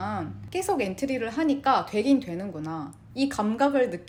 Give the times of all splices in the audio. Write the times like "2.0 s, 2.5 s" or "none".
none